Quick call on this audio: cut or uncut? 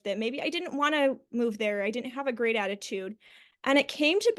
uncut